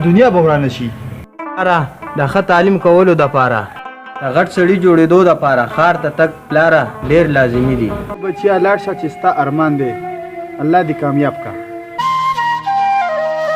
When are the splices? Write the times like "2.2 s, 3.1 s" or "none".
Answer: 8.1 s, 12.0 s